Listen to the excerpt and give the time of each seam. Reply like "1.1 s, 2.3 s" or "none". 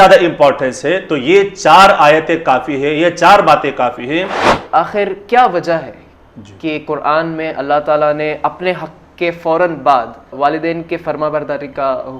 4.5 s, 10.3 s